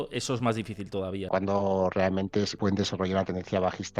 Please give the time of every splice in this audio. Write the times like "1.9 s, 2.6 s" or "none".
1.2 s, 2.5 s